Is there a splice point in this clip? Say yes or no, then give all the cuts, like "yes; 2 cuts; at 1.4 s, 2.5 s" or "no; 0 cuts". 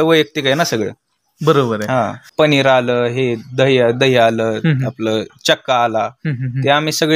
yes; 1 cut; at 2.2 s